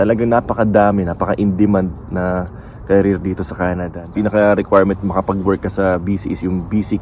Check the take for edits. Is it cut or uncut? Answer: cut